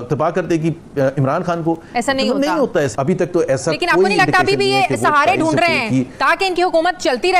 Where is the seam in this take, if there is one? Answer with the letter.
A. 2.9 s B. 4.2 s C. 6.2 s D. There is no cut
A